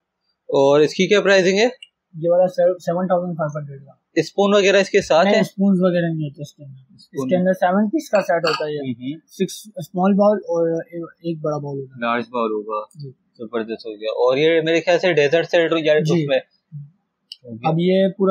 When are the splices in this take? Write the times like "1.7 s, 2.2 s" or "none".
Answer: none